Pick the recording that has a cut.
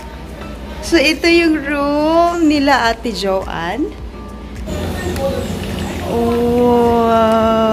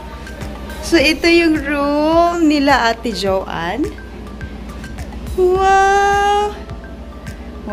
first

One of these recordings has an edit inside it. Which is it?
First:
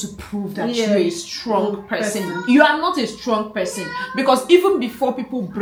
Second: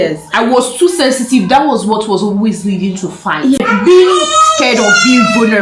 second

